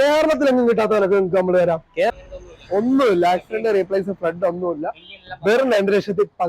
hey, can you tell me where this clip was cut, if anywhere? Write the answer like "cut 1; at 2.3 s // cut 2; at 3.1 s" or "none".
cut 1; at 2.1 s